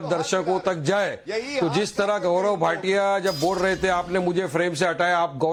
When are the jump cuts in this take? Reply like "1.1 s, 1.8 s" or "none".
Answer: none